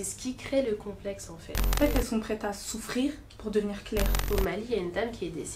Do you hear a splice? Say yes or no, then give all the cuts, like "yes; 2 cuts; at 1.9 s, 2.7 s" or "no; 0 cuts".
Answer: yes; 2 cuts; at 1.8 s, 4.2 s